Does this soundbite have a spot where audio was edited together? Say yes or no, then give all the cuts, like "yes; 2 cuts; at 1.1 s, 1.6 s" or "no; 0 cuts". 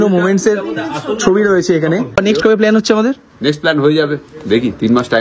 yes; 1 cut; at 2.2 s